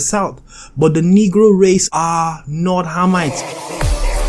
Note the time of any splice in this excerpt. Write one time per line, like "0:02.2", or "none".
0:01.9
0:03.3